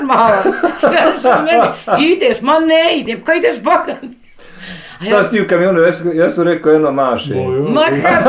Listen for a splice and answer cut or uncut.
uncut